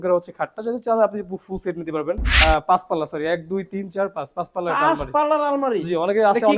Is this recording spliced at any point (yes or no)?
yes